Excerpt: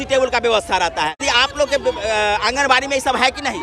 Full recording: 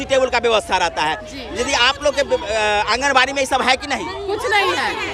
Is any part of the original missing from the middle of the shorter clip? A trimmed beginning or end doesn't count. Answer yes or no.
yes